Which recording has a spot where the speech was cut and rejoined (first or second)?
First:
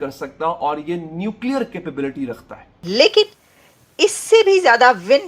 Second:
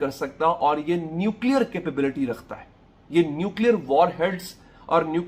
first